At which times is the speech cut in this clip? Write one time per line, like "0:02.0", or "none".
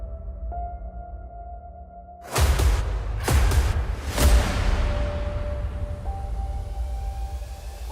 none